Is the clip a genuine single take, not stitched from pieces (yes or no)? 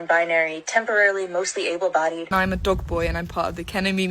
no